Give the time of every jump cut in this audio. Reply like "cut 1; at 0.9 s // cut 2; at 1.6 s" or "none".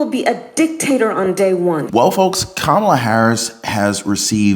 cut 1; at 1.9 s